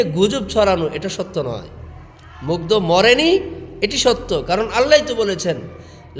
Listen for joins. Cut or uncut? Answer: uncut